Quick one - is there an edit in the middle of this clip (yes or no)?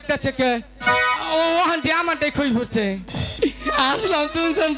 yes